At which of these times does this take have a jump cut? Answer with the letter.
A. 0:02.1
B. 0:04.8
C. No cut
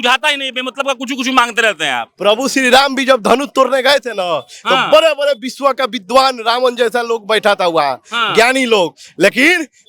A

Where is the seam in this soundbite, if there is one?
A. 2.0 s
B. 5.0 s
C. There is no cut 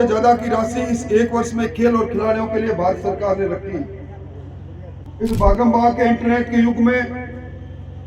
B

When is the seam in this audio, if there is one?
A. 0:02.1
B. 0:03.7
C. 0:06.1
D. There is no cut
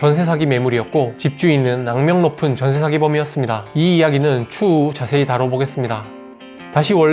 D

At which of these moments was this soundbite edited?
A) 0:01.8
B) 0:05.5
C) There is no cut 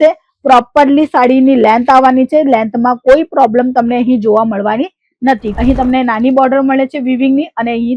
B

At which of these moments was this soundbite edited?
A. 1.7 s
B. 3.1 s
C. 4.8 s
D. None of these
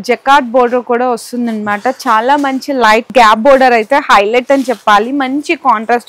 B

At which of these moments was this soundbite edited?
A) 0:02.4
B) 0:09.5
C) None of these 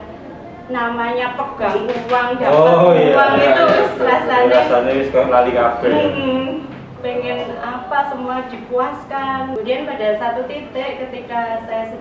B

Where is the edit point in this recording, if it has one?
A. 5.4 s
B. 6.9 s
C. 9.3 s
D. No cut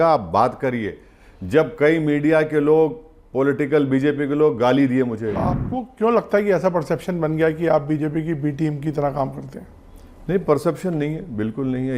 A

